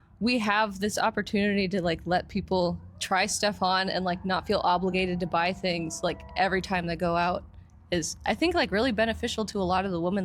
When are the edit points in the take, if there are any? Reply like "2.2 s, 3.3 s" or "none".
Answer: none